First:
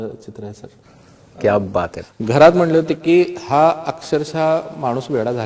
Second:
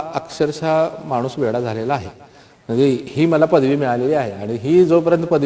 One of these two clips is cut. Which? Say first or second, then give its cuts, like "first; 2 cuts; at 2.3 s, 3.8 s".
first; 1 cut; at 2.0 s